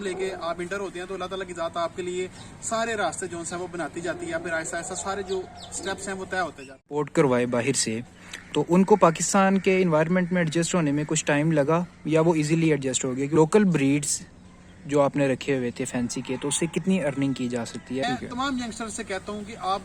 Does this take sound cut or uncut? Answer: cut